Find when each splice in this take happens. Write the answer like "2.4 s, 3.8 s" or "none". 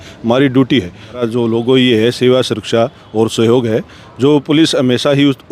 1.2 s